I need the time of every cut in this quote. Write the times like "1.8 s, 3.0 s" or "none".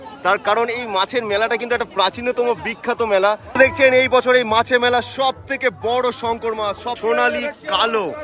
3.5 s, 7.0 s